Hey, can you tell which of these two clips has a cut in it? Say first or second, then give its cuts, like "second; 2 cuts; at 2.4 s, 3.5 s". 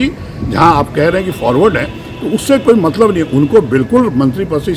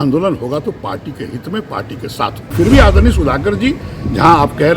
second; 1 cut; at 2.5 s